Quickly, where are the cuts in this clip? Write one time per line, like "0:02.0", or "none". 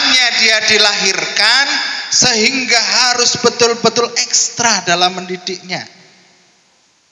none